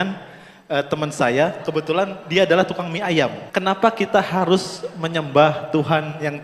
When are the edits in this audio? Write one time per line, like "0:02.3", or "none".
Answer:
0:03.4